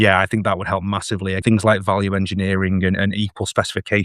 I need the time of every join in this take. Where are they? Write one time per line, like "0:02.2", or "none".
0:01.4